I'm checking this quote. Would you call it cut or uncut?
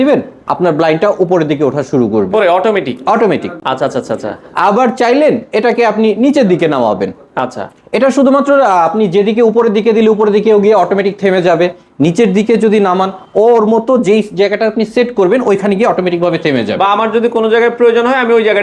uncut